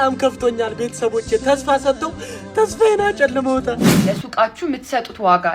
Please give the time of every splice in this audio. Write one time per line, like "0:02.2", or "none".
0:04.0